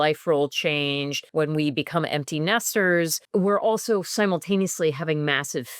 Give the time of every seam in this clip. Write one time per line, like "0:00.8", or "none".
0:01.2
0:03.2